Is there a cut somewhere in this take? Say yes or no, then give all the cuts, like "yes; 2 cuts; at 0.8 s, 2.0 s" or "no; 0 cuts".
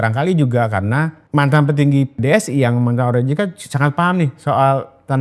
yes; 2 cuts; at 1.2 s, 2.2 s